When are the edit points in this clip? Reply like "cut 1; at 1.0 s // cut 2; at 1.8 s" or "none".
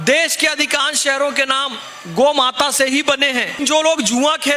cut 1; at 3.5 s